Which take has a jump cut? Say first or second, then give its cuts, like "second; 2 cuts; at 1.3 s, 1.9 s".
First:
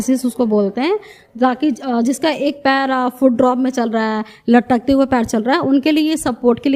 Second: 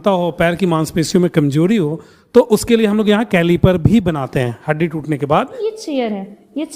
second; 1 cut; at 5.6 s